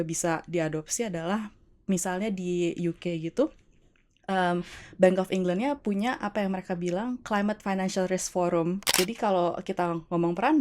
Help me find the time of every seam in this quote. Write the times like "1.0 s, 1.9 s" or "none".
8.8 s